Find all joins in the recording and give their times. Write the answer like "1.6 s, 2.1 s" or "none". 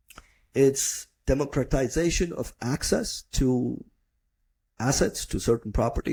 none